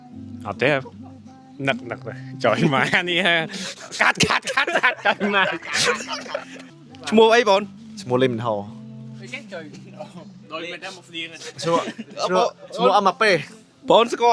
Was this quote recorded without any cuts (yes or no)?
yes